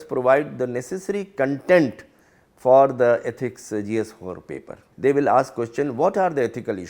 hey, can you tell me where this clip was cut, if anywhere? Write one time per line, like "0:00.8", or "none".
0:04.8